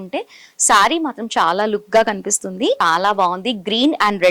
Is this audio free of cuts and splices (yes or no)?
no